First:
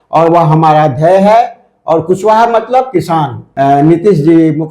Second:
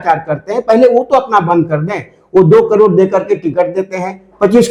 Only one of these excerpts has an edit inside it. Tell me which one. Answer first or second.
first